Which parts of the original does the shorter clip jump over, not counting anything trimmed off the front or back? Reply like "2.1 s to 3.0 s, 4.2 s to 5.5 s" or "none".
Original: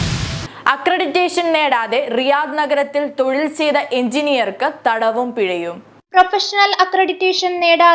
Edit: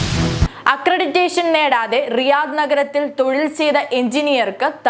none